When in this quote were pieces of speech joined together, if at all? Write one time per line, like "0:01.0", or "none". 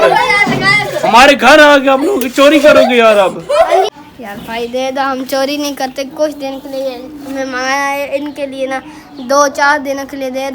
0:03.8